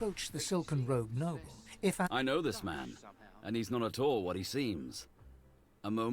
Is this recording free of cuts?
no; 1 cut; at 2.1 s

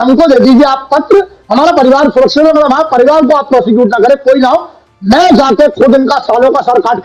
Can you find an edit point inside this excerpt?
no; 0 cuts

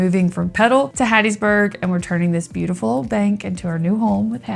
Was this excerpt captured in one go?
no; 1 cut; at 0.9 s

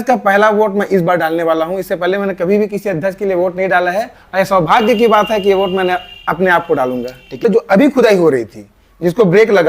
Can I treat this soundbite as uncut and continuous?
no; 1 cut; at 7.4 s

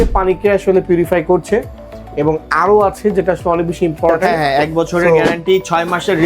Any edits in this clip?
yes; 1 cut; at 4.2 s

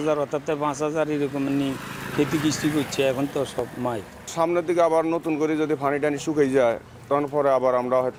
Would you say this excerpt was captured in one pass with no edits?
yes; 0 cuts

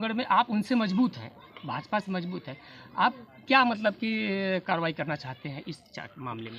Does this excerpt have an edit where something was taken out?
no; 0 cuts

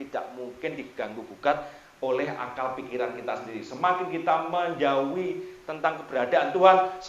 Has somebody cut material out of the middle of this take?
no; 0 cuts

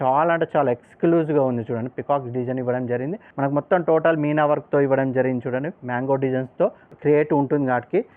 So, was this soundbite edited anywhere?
yes; 2 cuts; at 3.2 s, 7.0 s

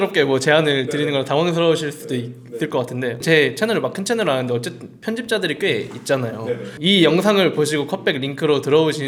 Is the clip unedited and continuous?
yes; 0 cuts

